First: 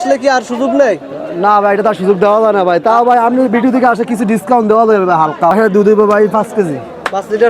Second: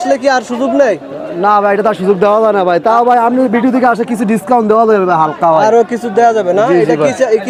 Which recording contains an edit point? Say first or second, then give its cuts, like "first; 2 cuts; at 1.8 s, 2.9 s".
first; 1 cut; at 5.5 s